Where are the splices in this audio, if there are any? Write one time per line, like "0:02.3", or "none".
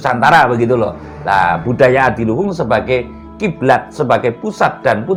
none